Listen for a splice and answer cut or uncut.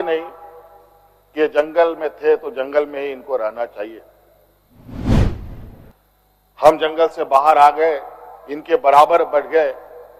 uncut